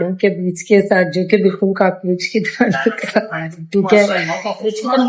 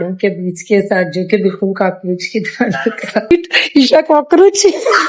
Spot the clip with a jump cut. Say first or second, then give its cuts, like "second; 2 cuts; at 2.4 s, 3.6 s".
second; 1 cut; at 3.3 s